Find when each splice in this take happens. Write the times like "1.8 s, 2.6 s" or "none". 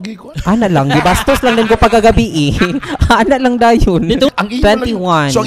4.3 s